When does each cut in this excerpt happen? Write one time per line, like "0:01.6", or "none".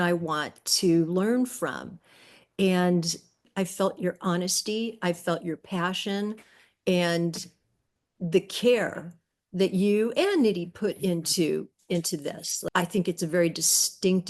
0:03.4
0:12.6